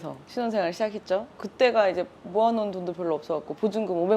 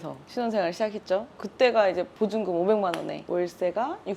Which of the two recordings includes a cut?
second; 1 cut; at 2.1 s

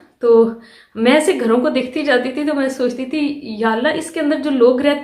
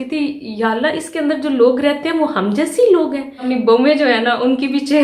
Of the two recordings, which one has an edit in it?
second; 1 cut; at 3.4 s

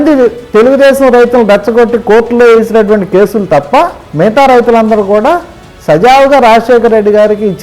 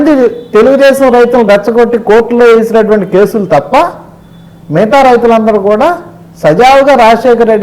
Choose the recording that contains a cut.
first; 1 cut; at 4.0 s

